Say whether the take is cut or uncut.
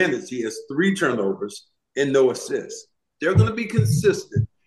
cut